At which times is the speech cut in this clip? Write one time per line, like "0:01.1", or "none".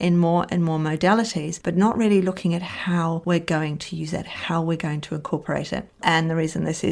0:06.0